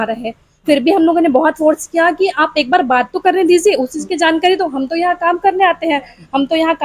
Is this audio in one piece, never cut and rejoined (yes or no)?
yes